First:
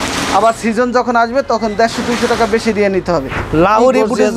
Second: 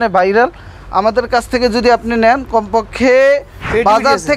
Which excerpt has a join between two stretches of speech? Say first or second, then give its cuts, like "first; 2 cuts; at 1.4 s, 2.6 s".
first; 1 cut; at 3.4 s